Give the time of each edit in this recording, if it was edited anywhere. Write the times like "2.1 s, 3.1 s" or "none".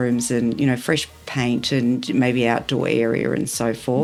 none